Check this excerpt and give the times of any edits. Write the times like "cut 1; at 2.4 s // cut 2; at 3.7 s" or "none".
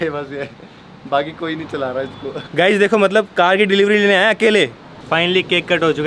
cut 1; at 2.5 s // cut 2; at 5.0 s